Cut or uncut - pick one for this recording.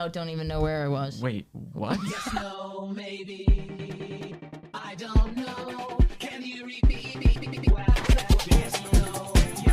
cut